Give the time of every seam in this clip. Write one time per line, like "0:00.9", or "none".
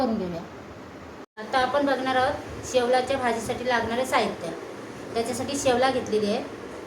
0:01.5